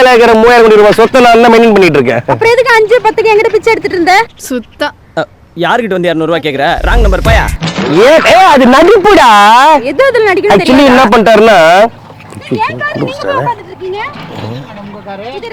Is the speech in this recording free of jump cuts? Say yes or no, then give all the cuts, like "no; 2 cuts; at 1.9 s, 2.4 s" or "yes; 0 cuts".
no; 1 cut; at 12.1 s